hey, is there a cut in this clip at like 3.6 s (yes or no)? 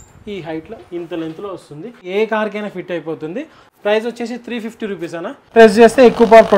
yes